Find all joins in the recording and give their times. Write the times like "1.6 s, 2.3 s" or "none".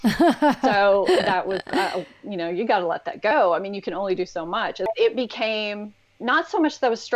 4.9 s